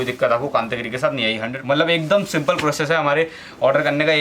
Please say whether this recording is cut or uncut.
cut